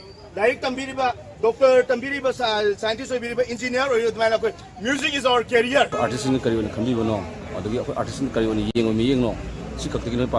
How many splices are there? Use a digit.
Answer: 1